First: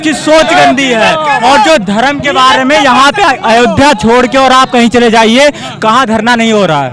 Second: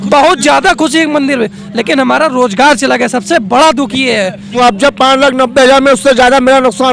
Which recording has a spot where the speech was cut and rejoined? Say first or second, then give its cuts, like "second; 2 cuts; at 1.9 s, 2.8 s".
second; 1 cut; at 4.5 s